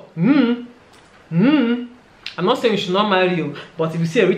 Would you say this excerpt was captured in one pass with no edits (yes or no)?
yes